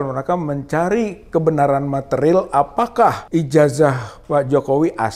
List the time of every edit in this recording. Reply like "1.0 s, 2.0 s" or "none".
3.2 s